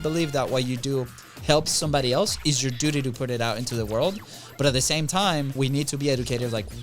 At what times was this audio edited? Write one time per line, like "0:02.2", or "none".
0:05.5